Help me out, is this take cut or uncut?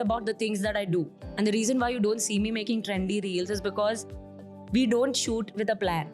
cut